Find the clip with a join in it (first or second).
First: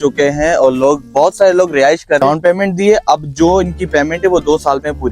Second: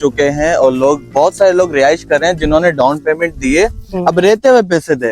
first